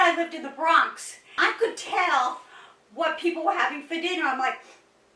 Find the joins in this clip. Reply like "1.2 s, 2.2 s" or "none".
1.4 s